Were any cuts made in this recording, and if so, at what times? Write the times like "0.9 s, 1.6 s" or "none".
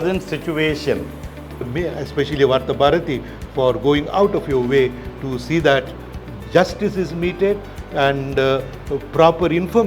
1.6 s